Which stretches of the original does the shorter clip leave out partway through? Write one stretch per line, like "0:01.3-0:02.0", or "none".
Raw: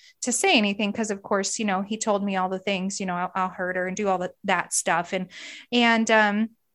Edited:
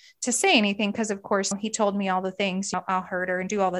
0:01.5-0:01.8
0:03.0-0:03.2